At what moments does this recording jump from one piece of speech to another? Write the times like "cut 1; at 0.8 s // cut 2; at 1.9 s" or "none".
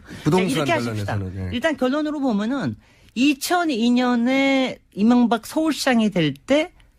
cut 1; at 2.1 s